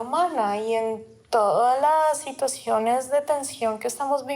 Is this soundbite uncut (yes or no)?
yes